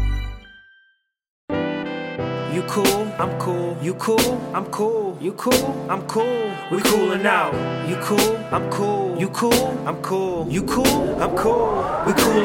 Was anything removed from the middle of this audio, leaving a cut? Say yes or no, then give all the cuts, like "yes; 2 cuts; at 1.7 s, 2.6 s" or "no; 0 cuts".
yes; 1 cut; at 1.4 s